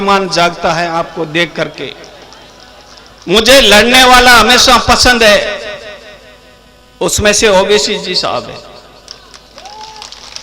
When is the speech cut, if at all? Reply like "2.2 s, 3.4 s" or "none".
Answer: 3.2 s